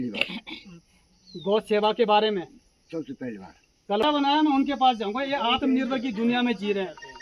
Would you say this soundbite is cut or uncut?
cut